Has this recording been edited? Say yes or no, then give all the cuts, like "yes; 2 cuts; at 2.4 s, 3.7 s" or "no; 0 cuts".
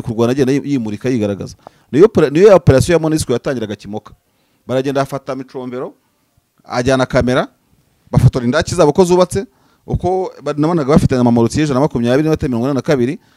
no; 0 cuts